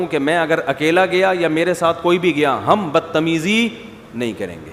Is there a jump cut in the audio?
no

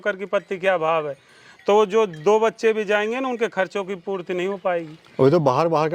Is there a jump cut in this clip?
no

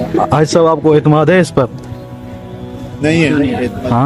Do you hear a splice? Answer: no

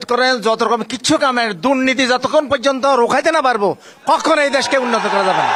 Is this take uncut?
yes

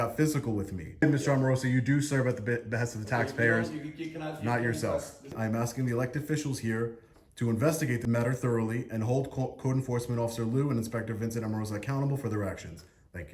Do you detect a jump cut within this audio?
yes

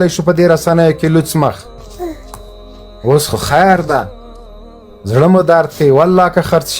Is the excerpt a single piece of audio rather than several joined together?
yes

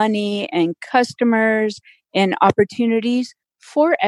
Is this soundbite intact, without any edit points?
yes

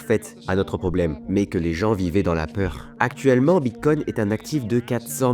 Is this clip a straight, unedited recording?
no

